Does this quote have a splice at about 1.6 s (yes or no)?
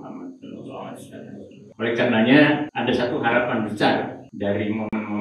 yes